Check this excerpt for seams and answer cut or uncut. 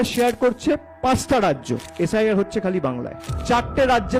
cut